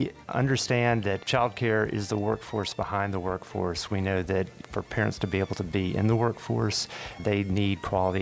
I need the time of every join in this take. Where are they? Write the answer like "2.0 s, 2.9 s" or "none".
1.2 s